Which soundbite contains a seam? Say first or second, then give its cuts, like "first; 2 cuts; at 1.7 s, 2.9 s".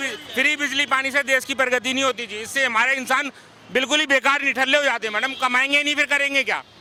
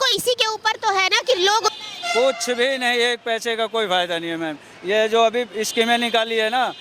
second; 1 cut; at 1.7 s